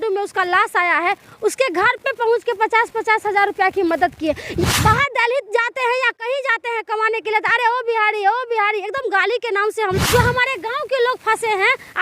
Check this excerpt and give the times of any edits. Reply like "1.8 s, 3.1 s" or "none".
4.6 s, 10.0 s